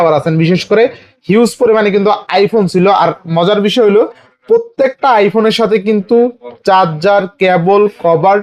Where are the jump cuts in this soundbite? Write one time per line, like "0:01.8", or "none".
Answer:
none